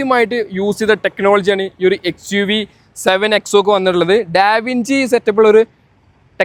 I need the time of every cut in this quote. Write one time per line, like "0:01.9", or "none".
none